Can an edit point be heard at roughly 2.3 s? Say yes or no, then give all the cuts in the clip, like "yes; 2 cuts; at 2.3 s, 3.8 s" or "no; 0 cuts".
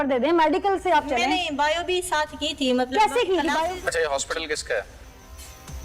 no; 1 cut; at 3.7 s